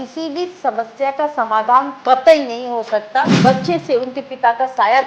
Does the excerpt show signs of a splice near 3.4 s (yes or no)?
yes